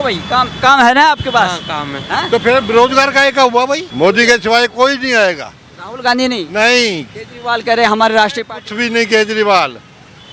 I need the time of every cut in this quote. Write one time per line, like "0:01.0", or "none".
0:03.9